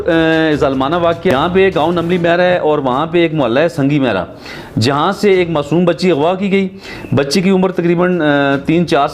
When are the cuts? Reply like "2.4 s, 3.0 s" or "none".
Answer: 1.3 s